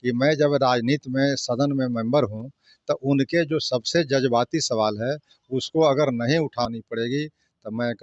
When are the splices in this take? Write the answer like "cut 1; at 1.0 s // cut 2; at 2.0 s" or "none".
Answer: cut 1; at 6.7 s